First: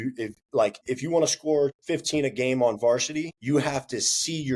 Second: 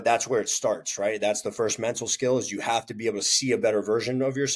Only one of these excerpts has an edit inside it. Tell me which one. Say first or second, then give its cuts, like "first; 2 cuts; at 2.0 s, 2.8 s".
first; 3 cuts; at 0.8 s, 1.8 s, 3.3 s